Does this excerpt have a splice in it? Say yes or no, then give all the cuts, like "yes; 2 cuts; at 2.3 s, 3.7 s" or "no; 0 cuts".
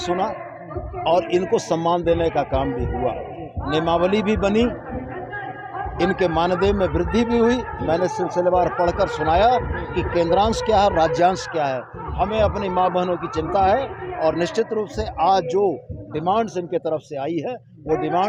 no; 0 cuts